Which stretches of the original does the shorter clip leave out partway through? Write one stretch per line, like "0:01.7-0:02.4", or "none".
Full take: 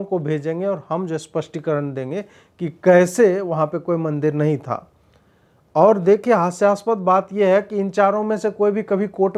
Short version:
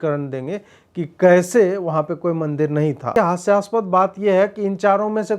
0:04.7-0:06.2